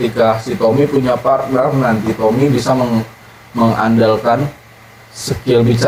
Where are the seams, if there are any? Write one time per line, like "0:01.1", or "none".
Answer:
none